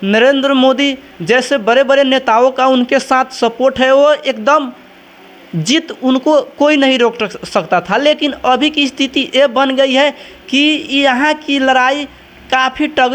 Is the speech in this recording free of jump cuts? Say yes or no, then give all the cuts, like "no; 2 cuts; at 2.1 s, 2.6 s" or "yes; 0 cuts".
yes; 0 cuts